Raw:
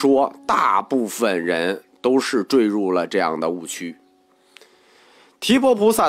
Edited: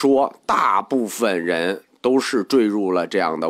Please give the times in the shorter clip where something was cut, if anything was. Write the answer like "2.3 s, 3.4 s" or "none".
none